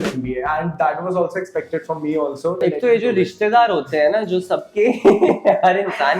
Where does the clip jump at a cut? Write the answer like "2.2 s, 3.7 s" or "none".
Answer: 2.6 s